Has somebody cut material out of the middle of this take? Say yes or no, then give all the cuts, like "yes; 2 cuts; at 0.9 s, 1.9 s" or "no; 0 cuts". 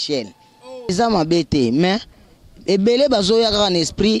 yes; 1 cut; at 0.9 s